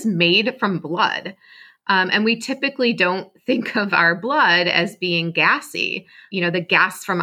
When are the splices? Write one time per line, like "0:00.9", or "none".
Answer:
0:06.2